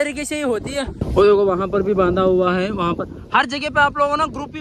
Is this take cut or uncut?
cut